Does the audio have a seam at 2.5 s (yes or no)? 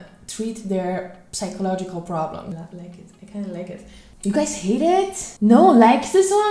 yes